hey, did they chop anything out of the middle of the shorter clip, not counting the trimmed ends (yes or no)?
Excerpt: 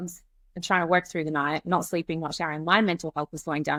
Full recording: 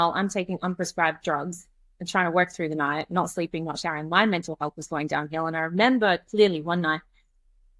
no